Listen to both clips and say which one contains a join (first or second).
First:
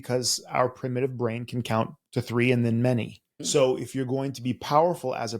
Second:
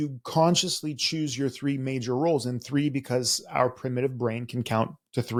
first